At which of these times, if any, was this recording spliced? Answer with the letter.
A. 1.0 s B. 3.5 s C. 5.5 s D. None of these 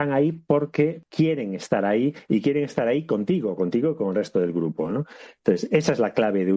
A